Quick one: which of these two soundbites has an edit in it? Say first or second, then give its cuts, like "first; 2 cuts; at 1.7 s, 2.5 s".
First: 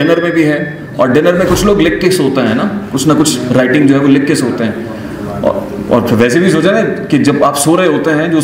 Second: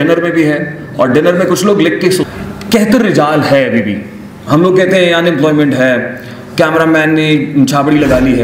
second; 1 cut; at 2.2 s